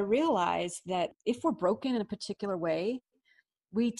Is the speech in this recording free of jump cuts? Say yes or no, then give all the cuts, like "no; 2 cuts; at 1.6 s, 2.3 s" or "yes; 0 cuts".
no; 1 cut; at 1.2 s